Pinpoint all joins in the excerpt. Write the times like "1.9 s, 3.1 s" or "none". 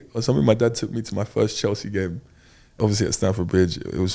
2.8 s